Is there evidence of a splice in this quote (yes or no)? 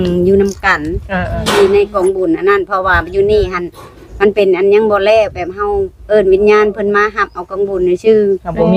no